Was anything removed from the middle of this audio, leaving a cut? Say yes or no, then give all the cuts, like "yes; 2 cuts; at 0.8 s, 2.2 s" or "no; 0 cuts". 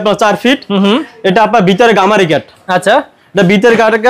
no; 0 cuts